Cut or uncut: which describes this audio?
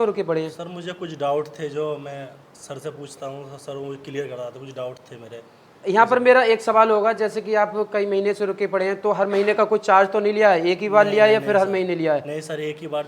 uncut